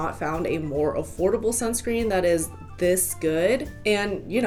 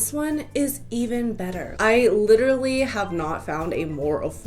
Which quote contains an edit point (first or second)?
second